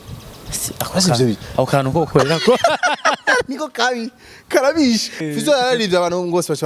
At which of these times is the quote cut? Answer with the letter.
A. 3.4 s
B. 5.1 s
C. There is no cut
B